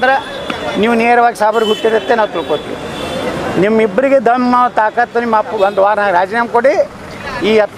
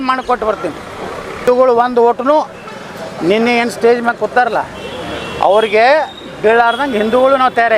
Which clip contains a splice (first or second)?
second